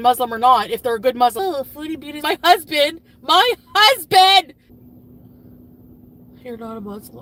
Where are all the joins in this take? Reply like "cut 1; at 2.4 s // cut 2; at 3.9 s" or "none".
none